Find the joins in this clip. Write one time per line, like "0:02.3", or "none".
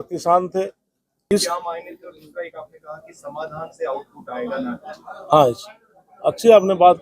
0:01.3